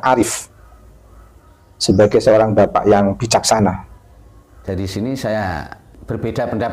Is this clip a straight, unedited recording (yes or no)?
no